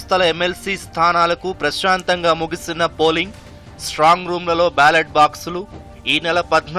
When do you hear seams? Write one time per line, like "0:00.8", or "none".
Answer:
none